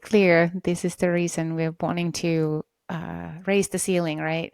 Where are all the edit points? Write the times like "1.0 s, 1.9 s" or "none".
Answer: none